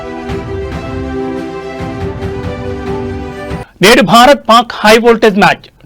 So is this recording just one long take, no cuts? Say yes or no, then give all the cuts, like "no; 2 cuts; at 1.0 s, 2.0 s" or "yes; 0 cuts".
no; 1 cut; at 3.1 s